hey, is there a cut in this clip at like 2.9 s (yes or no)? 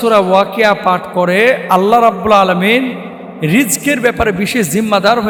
no